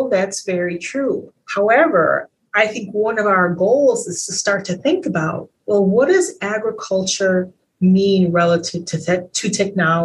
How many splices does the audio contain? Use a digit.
2